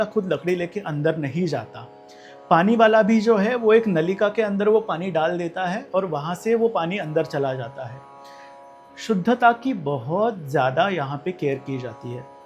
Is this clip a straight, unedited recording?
yes; 0 cuts

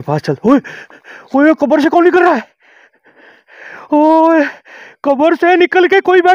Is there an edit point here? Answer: no; 0 cuts

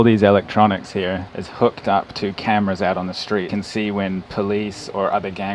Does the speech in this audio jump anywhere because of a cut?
yes; 2 cuts; at 1.2 s, 3.5 s

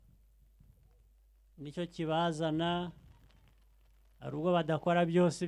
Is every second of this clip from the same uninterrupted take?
yes; 0 cuts

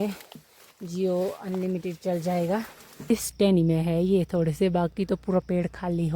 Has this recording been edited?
yes; 1 cut; at 3.1 s

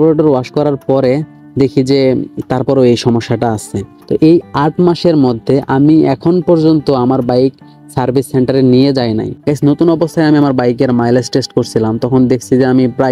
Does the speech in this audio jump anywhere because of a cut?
yes; 2 cuts; at 3.9 s, 9.3 s

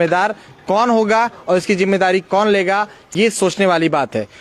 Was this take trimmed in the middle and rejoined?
no; 0 cuts

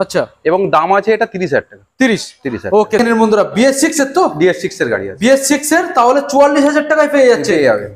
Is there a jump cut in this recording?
yes; 1 cut; at 3.0 s

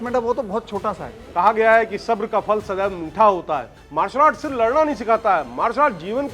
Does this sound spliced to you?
yes; 2 cuts; at 1.2 s, 3.8 s

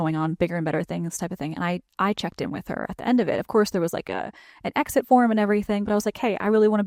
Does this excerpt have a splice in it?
no; 0 cuts

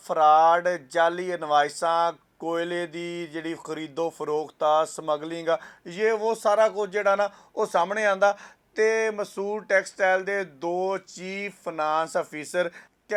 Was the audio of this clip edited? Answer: no; 0 cuts

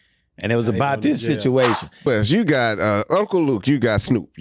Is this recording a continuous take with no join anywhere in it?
no; 1 cut; at 2.1 s

